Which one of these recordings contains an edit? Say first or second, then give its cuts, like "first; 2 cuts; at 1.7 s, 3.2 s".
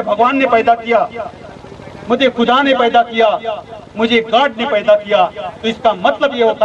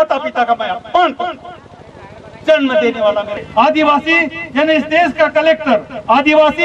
second; 1 cut; at 3.3 s